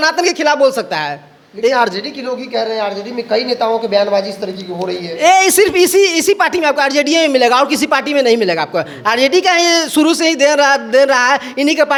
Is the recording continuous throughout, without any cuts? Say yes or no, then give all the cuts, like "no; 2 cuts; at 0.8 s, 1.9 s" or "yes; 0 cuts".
yes; 0 cuts